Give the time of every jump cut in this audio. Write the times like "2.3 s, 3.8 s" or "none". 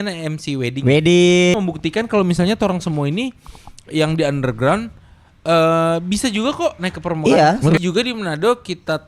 1.5 s, 7.8 s